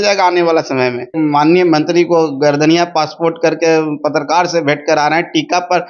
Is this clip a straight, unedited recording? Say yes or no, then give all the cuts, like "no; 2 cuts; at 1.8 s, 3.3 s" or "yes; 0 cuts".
no; 1 cut; at 1.1 s